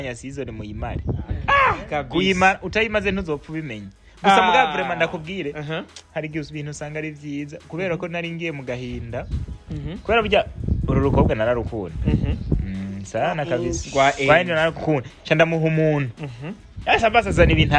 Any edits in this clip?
no; 0 cuts

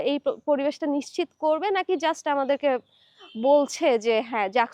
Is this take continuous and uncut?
yes; 0 cuts

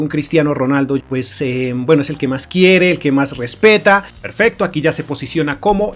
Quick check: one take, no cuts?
no; 2 cuts; at 1.1 s, 4.2 s

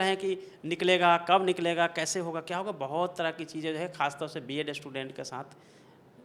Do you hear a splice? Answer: no; 0 cuts

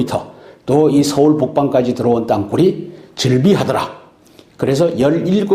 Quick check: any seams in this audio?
no; 0 cuts

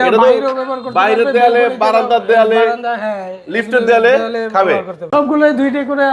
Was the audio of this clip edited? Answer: yes; 1 cut; at 5.1 s

